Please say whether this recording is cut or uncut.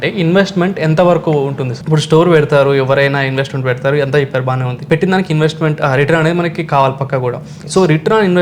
cut